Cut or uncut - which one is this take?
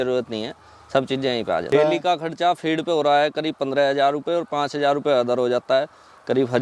cut